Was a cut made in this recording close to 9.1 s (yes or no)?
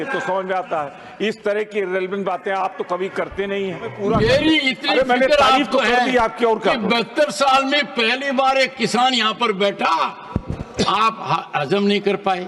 no